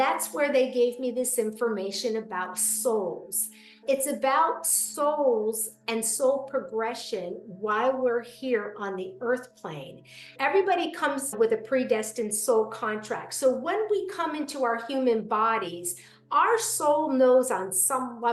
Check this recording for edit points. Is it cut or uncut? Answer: cut